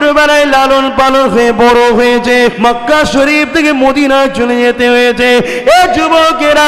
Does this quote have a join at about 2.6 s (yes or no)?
yes